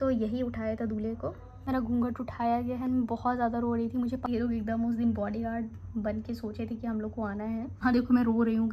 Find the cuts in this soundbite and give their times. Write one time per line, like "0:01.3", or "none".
0:01.7
0:04.3
0:07.8